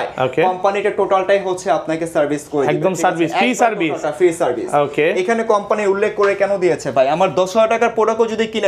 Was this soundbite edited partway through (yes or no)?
no